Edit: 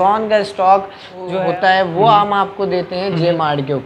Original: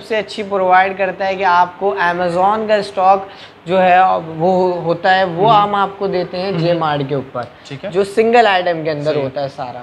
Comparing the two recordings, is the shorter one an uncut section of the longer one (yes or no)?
no